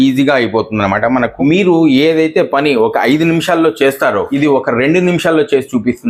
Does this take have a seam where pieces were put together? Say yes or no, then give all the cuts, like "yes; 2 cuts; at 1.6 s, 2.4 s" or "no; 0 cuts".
yes; 2 cuts; at 1.4 s, 4.3 s